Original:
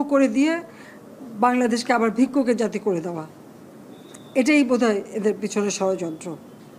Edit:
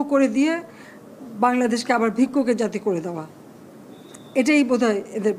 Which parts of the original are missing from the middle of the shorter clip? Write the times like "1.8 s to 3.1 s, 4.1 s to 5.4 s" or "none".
none

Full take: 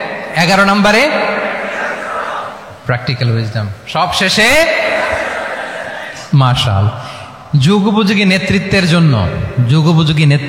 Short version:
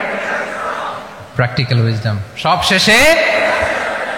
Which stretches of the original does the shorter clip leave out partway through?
none

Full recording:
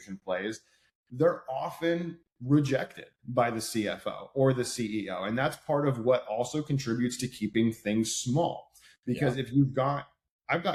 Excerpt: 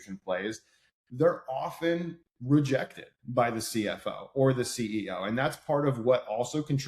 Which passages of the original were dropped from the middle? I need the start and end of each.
none

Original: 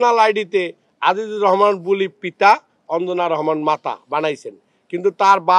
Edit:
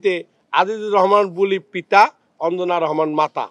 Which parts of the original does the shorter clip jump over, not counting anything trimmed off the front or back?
none

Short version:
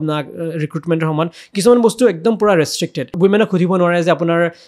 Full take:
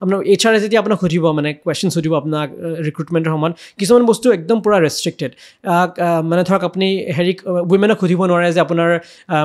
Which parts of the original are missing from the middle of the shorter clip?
5.4 s to 7.6 s

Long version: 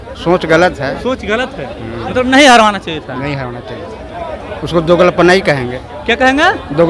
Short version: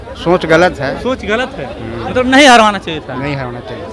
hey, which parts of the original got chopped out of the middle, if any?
none

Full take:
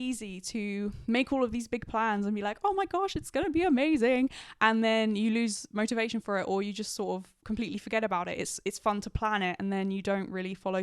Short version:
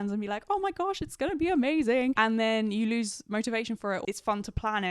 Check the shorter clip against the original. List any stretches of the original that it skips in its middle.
4.3 s to 4.6 s, 6.5 s to 8.6 s

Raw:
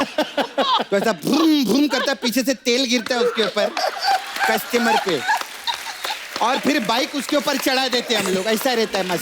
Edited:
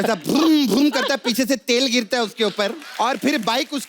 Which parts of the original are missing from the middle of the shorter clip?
3.7 s to 6.2 s

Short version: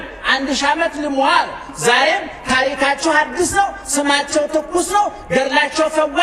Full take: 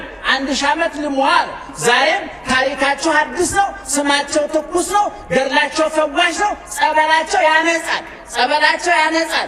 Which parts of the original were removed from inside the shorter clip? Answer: none

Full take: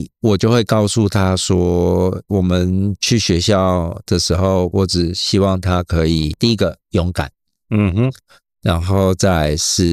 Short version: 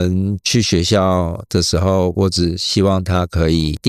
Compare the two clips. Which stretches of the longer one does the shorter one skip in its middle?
none

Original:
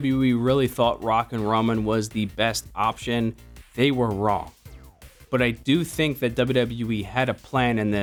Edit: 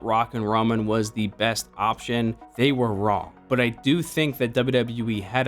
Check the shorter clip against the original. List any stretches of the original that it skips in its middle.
3.4 s to 3.6 s, 4.5 s to 5.2 s

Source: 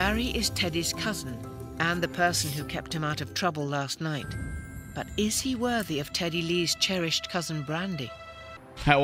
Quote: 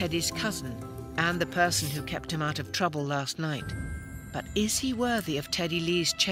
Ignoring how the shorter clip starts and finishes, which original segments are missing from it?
none

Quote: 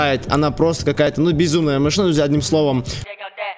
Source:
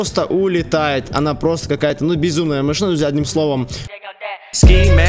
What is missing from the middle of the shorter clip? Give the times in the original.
none

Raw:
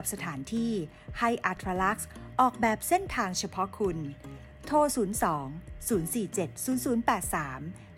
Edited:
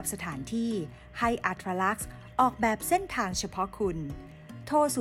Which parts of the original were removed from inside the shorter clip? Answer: none

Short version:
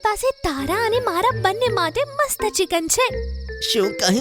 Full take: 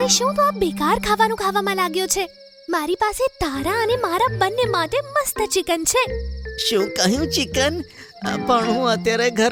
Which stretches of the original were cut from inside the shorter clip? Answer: none

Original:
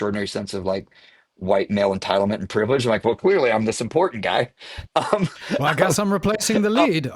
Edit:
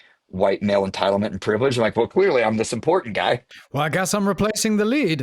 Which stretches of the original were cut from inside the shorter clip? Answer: 4.7 s to 5.5 s

